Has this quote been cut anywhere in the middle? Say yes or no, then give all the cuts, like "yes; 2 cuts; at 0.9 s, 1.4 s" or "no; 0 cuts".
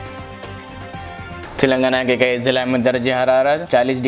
no; 0 cuts